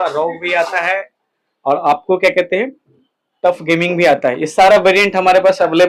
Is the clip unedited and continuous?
yes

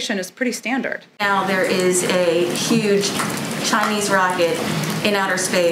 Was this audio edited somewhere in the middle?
yes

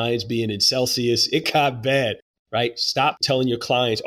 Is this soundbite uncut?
no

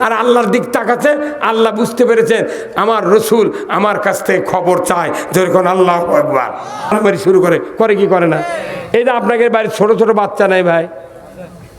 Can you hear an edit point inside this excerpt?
yes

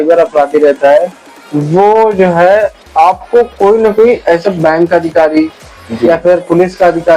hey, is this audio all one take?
yes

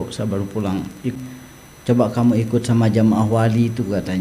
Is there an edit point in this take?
yes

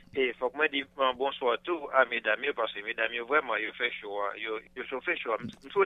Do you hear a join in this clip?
no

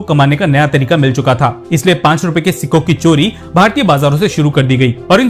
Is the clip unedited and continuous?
yes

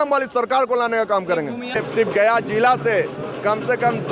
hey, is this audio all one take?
no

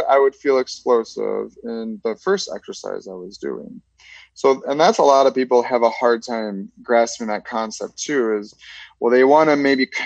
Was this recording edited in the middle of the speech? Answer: no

